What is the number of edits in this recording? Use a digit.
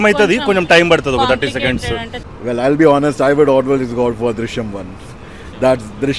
1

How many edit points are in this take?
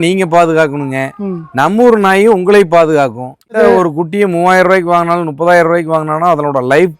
1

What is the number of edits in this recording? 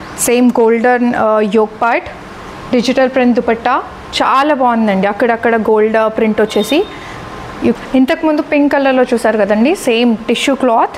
1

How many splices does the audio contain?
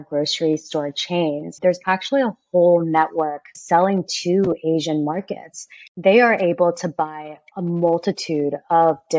3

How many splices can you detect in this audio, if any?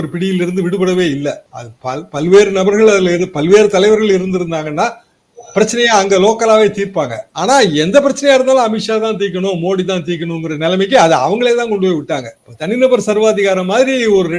0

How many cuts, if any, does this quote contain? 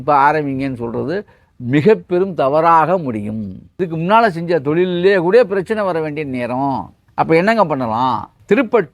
1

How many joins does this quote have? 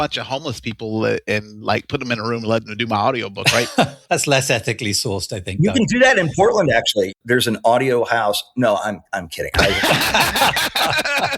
2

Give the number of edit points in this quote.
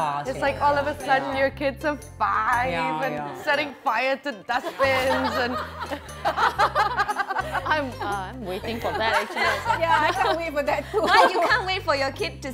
0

